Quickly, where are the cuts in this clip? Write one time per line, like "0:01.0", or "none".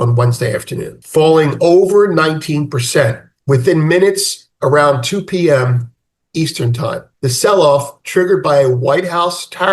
0:01.0
0:07.1